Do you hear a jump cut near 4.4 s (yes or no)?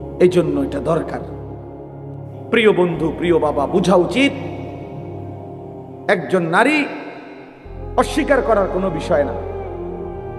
yes